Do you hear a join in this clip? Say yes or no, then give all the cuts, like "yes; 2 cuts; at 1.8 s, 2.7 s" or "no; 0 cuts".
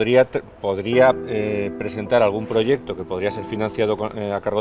no; 0 cuts